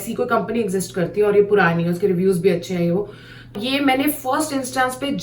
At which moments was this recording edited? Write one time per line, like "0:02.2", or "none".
0:03.5